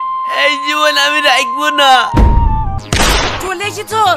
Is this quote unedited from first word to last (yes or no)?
no